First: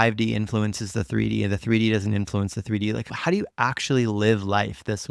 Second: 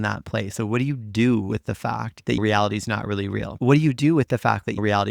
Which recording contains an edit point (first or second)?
second